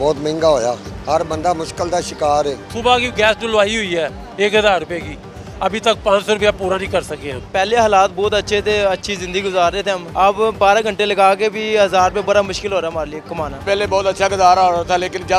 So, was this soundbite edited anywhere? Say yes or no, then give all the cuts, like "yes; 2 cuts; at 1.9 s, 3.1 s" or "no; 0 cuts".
yes; 5 cuts; at 0.9 s, 2.7 s, 7.4 s, 10.0 s, 13.6 s